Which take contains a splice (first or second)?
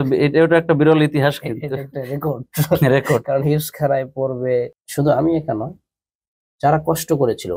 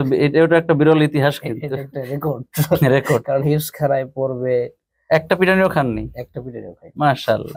first